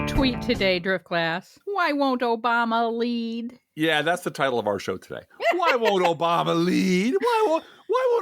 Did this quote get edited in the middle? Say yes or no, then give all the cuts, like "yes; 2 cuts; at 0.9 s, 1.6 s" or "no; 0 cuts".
yes; 1 cut; at 1.5 s